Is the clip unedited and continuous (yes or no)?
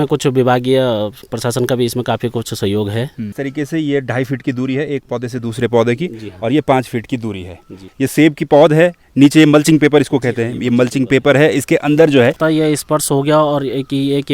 no